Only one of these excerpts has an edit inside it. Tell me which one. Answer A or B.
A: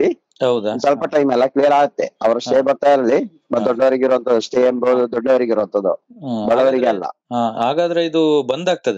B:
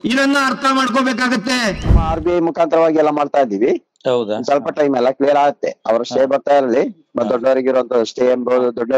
B